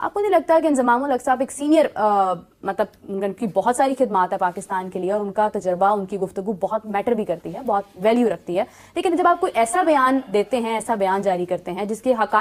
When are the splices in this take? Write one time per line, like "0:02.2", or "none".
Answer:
none